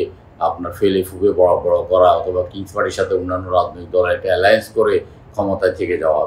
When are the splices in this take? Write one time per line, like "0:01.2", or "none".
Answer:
none